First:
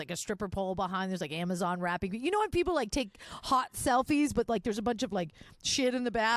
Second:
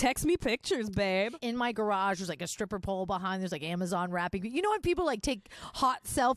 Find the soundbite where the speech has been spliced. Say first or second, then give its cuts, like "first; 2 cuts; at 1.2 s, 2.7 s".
second; 1 cut; at 1.4 s